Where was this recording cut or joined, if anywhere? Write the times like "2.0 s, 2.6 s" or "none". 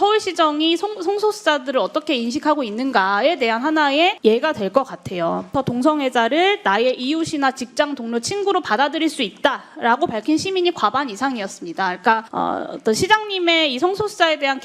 4.2 s, 5.5 s, 12.3 s